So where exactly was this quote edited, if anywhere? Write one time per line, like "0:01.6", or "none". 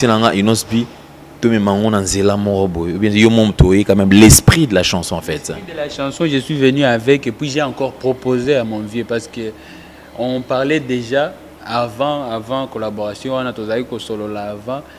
none